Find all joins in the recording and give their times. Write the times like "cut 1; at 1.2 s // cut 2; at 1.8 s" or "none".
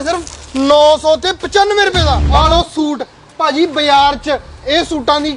cut 1; at 2.2 s